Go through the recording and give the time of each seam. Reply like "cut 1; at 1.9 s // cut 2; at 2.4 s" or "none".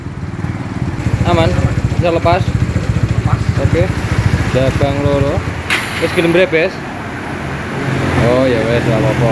cut 1; at 1.0 s